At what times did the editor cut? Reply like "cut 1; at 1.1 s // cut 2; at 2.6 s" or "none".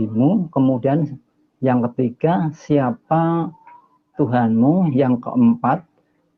none

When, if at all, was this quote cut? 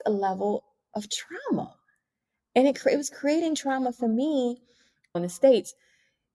cut 1; at 5.1 s

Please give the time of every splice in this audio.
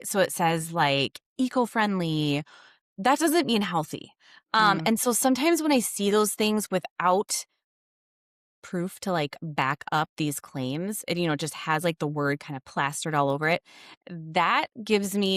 none

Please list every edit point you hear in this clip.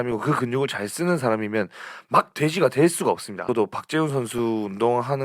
cut 1; at 3.3 s

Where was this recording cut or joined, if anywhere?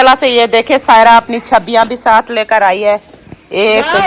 none

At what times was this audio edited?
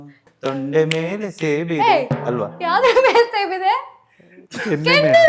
none

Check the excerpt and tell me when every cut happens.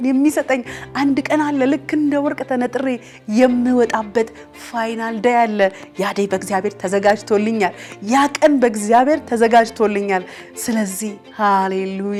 none

